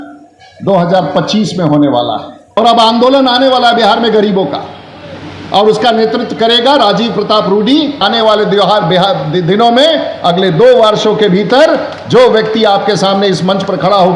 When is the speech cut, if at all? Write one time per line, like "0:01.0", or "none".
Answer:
0:02.6
0:08.0

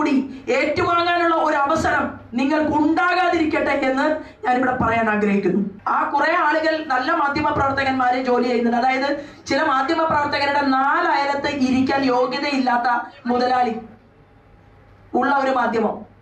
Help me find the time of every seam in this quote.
0:05.8

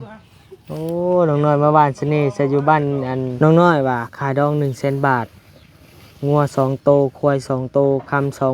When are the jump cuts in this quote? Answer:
0:03.3

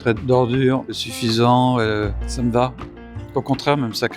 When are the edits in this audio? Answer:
0:02.2

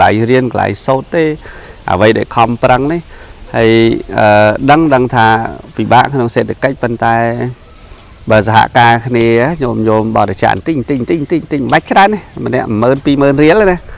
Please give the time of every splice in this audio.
none

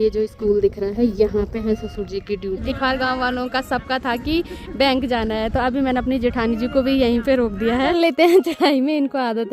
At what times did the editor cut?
0:02.6
0:07.9

